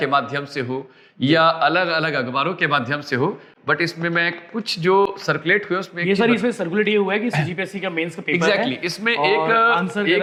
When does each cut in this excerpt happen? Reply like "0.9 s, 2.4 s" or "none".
none